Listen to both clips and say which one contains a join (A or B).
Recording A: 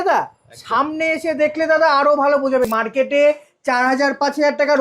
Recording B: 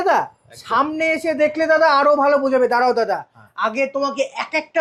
A